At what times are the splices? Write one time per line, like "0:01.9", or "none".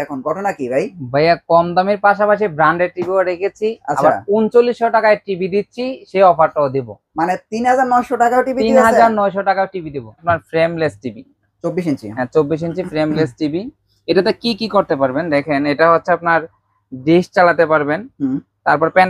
0:10.2